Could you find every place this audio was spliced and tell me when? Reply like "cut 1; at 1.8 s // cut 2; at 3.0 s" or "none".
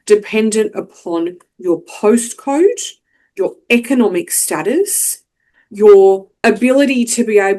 cut 1; at 6.3 s